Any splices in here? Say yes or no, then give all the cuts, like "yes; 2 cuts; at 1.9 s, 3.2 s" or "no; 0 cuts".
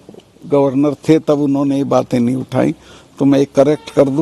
no; 0 cuts